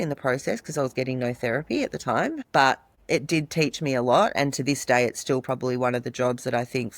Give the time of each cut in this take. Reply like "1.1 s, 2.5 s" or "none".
2.9 s